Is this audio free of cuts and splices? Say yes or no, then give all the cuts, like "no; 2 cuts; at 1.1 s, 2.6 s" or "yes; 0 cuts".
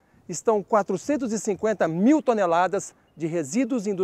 yes; 0 cuts